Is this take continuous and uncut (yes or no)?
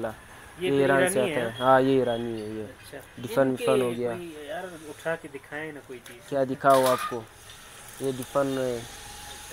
yes